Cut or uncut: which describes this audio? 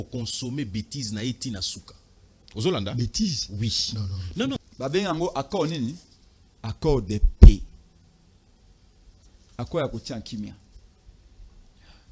cut